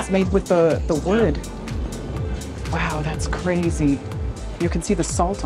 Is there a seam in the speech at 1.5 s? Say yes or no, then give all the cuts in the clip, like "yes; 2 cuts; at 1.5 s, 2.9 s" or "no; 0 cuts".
no; 0 cuts